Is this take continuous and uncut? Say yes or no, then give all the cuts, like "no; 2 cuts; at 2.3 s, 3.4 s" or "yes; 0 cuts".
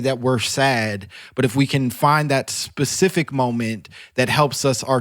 yes; 0 cuts